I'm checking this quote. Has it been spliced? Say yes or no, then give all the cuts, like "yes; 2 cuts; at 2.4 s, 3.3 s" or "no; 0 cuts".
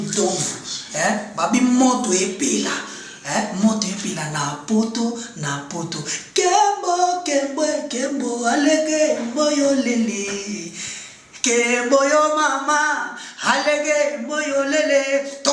no; 0 cuts